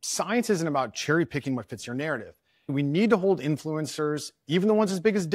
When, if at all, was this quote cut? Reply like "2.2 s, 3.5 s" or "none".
2.7 s